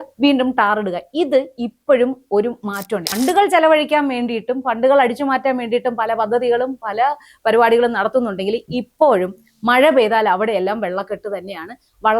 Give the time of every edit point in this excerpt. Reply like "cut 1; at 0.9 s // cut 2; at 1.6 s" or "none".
cut 1; at 3.1 s